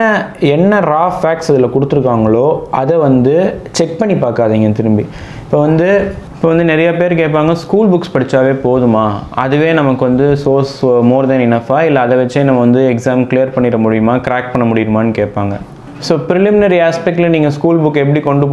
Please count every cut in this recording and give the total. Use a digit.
2